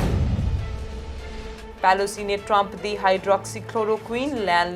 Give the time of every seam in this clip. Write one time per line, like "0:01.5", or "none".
none

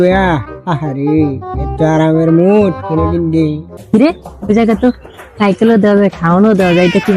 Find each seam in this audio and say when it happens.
0:03.7

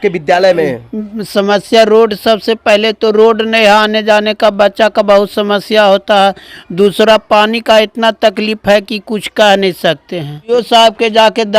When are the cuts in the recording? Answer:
0:10.5

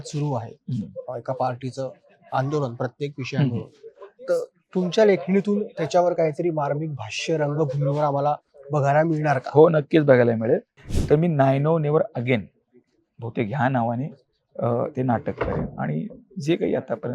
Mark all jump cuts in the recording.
0:10.8

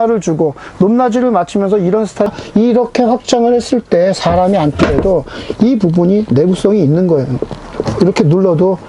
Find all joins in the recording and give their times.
0:02.3

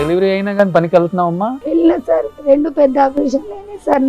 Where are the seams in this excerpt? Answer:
0:01.6
0:02.3

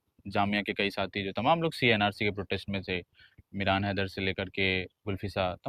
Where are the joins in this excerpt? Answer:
none

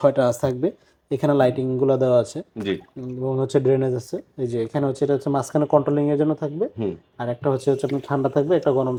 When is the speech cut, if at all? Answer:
none

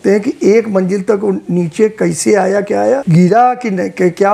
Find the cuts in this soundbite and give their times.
0:03.0

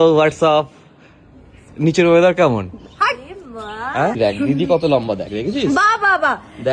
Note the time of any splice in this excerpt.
0:04.2

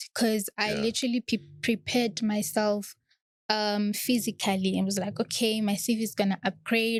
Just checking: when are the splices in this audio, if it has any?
none

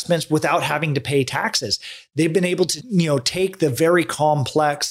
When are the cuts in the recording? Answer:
0:02.8

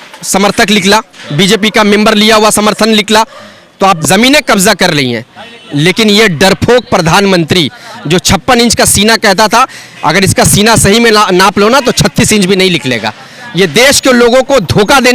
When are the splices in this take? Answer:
0:04.0

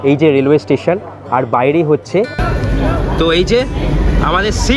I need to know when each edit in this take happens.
0:02.4

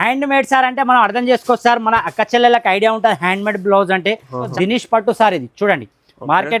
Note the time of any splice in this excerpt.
0:04.5

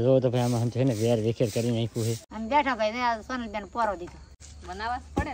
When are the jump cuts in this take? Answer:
0:02.3
0:04.4

